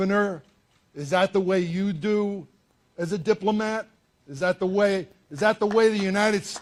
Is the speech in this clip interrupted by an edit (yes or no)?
no